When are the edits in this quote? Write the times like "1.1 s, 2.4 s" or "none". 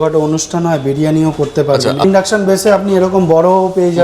2.0 s